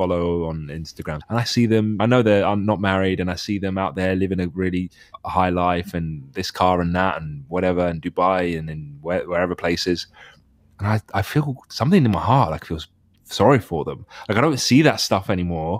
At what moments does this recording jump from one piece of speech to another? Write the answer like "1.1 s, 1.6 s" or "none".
1.1 s, 2.0 s, 5.1 s